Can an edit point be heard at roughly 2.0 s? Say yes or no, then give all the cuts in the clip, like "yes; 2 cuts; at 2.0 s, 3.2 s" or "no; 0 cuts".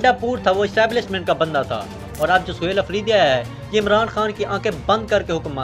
yes; 1 cut; at 2.0 s